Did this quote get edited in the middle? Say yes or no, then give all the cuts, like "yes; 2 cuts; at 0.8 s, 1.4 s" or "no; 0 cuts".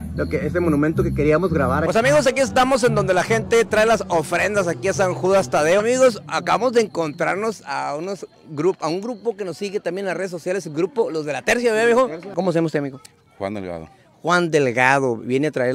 yes; 3 cuts; at 1.8 s, 5.8 s, 12.3 s